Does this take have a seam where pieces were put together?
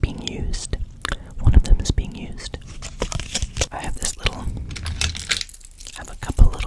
yes; 1 cut; at 3.7 s

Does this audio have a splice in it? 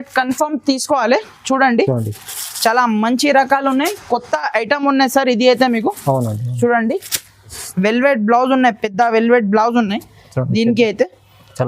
yes; 1 cut; at 7.5 s

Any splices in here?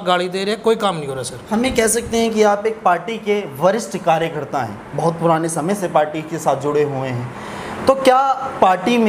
no; 0 cuts

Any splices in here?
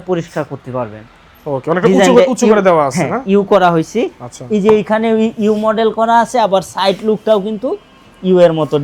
no; 0 cuts

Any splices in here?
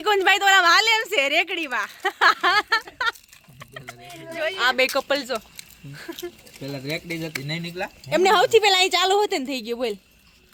no; 0 cuts

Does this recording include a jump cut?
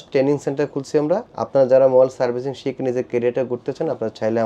yes; 1 cut; at 1.3 s

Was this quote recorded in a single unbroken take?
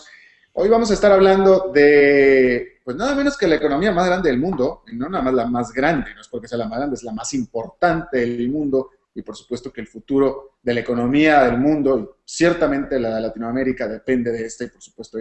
yes; 0 cuts

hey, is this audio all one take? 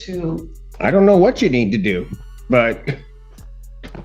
yes; 0 cuts

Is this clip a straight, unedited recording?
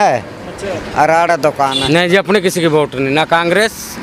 no; 1 cut; at 1.8 s

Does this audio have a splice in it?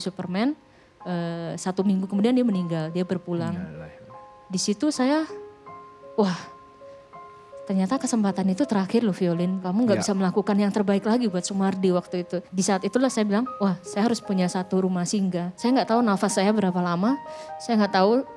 yes; 2 cuts; at 9.6 s, 15.5 s

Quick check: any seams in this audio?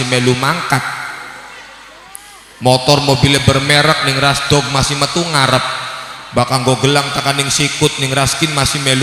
no; 0 cuts

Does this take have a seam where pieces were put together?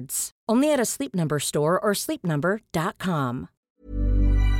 yes; 1 cut; at 3.5 s

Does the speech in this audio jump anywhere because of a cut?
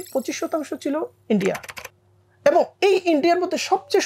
no; 0 cuts

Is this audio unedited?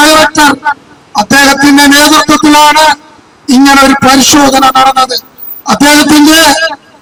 yes; 0 cuts

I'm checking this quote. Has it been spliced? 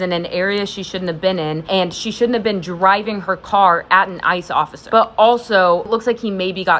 yes; 2 cuts; at 1.6 s, 5.8 s

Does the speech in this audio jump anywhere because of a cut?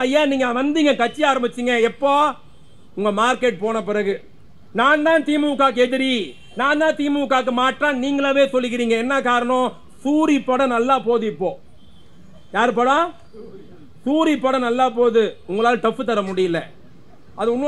no; 0 cuts

